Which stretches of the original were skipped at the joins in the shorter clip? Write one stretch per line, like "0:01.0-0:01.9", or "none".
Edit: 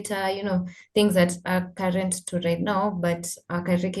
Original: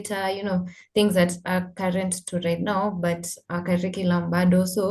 none